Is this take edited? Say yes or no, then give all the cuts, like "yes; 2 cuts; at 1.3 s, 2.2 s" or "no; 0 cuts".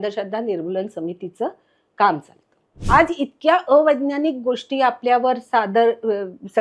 yes; 1 cut; at 2.7 s